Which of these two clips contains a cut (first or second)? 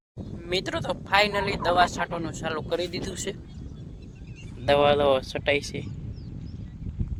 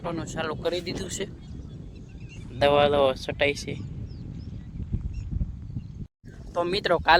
second